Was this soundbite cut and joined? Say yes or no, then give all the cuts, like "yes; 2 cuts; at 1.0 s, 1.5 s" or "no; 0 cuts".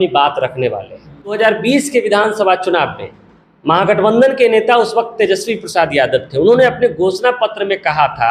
yes; 1 cut; at 1.3 s